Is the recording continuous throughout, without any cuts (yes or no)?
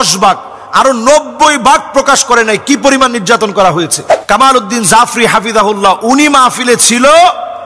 yes